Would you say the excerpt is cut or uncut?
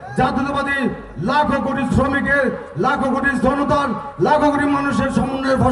uncut